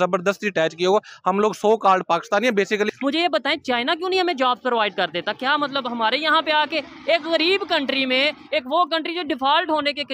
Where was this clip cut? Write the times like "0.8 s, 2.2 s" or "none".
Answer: 2.9 s